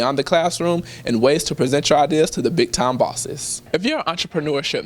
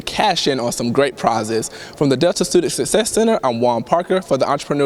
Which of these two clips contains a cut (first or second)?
first